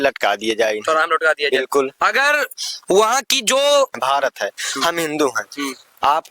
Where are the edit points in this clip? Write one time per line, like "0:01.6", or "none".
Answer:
0:04.0